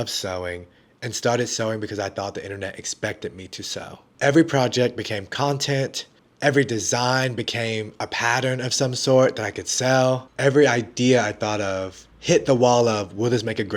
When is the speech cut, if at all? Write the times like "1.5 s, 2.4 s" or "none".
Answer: 4.0 s